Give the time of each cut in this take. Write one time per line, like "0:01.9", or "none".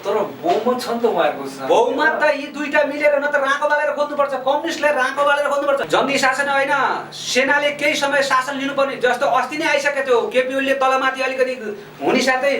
0:05.8